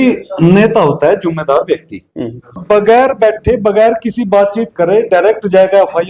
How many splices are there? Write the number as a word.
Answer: one